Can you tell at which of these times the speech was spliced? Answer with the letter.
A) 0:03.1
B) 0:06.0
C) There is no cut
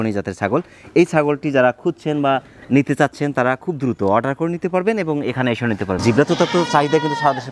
B